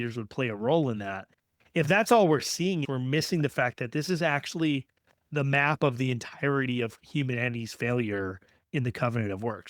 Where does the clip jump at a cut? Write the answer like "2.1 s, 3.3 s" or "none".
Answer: 2.8 s